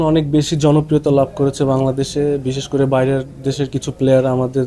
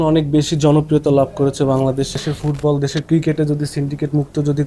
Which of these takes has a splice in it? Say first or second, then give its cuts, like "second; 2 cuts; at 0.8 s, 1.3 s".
second; 1 cut; at 2.1 s